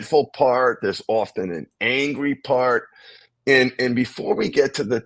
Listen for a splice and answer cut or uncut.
uncut